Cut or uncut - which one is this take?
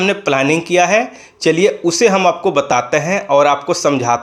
uncut